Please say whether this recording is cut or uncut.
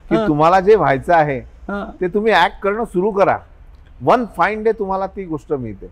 uncut